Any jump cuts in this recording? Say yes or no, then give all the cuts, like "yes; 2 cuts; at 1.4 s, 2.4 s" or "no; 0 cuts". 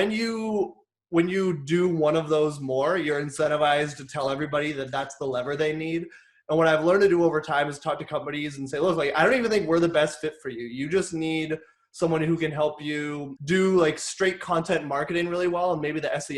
yes; 1 cut; at 13.3 s